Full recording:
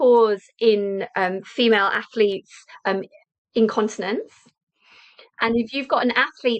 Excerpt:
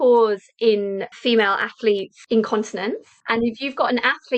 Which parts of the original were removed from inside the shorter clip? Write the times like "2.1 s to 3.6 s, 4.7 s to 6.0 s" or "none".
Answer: 1.1 s to 1.4 s, 2.5 s to 3.4 s, 4.4 s to 5.2 s